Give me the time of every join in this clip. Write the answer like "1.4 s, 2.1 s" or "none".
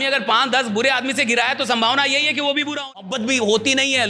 3.0 s